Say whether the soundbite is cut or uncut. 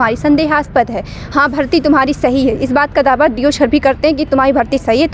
cut